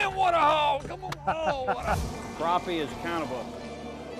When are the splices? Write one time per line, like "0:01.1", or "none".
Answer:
0:02.0